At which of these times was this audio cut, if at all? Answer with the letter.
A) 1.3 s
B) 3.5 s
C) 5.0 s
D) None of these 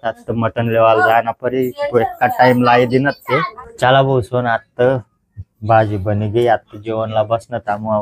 B